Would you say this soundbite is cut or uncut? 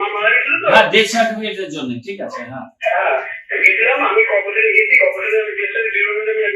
uncut